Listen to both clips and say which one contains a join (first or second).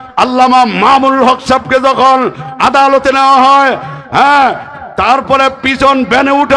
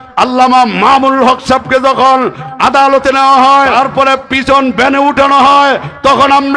second